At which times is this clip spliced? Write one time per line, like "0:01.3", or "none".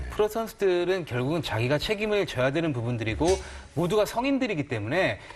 0:04.3